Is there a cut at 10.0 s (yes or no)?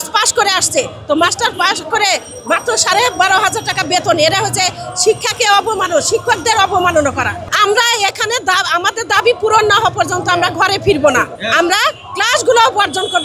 no